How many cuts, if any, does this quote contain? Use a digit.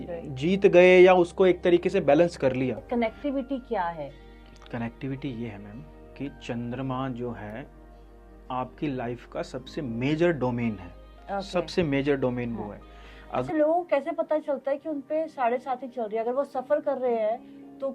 2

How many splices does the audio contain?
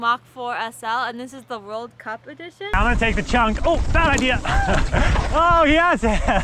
1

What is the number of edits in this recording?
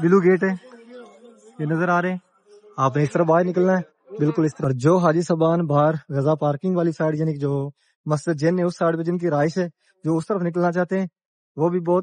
1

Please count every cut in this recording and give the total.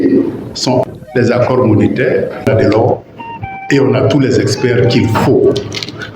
2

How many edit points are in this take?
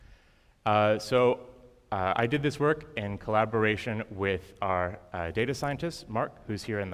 0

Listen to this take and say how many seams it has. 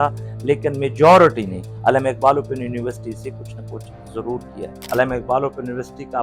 1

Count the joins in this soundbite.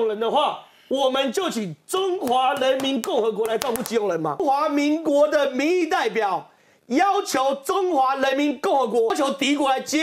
2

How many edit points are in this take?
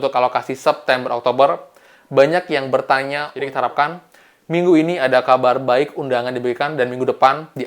1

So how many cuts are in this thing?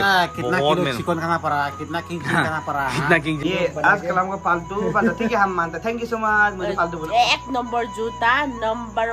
1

